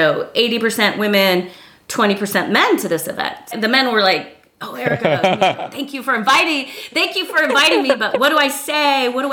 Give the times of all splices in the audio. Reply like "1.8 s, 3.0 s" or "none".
3.5 s